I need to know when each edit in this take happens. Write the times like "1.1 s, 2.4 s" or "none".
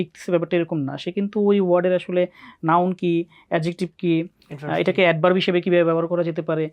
none